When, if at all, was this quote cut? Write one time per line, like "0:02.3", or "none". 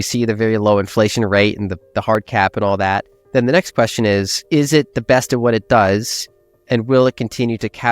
0:04.4